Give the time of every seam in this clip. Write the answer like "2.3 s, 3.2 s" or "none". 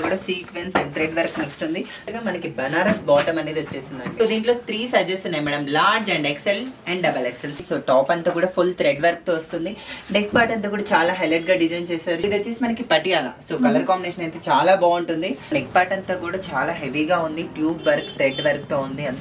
2.1 s, 4.0 s, 7.6 s, 12.2 s, 15.5 s